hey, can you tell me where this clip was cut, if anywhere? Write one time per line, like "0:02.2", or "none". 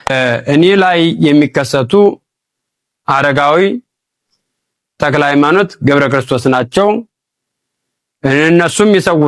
none